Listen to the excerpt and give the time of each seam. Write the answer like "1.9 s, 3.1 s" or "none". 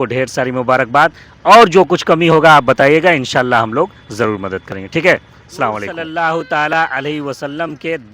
6.0 s